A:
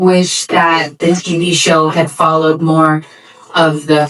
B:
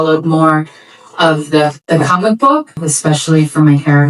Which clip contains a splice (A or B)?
B